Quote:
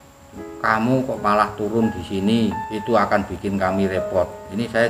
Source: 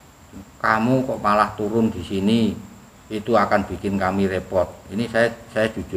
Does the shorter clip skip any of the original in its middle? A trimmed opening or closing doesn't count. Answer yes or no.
yes